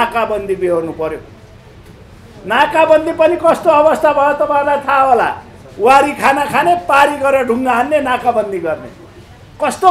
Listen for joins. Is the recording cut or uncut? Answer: uncut